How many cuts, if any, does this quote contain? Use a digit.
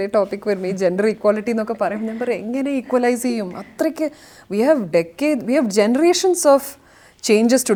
0